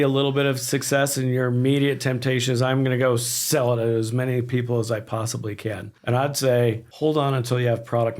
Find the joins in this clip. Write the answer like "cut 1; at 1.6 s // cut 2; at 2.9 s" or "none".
cut 1; at 5.9 s // cut 2; at 6.9 s